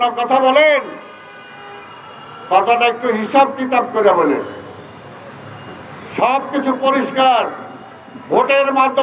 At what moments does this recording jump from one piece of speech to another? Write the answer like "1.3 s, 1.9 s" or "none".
none